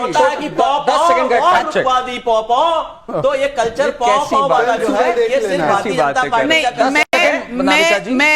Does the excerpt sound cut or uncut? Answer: uncut